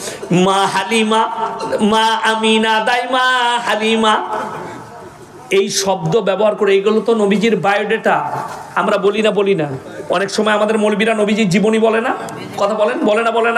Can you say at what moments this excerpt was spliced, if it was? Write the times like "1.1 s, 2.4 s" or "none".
none